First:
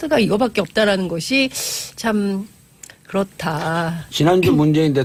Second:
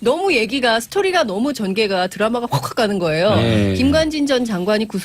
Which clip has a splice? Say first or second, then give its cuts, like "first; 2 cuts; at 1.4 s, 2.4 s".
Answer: second; 1 cut; at 1.0 s